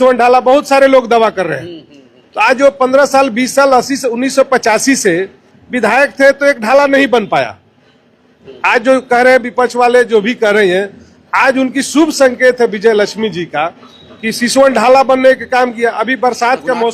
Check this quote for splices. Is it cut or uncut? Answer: uncut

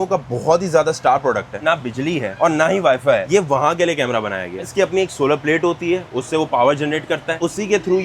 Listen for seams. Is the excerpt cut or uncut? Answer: cut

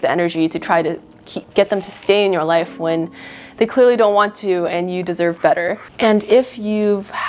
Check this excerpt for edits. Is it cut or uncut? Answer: uncut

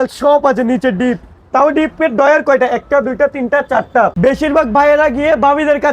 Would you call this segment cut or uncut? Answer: cut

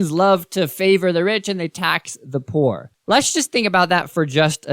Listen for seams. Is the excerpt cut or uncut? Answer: cut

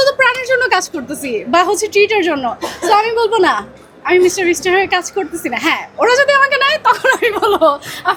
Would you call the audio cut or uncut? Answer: uncut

